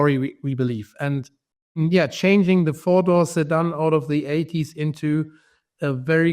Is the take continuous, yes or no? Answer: yes